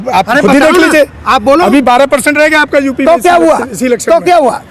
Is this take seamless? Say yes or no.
yes